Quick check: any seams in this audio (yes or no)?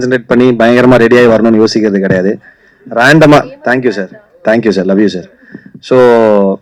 no